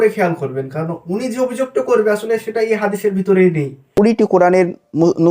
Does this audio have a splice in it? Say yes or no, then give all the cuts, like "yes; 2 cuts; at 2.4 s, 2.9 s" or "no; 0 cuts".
yes; 1 cut; at 3.8 s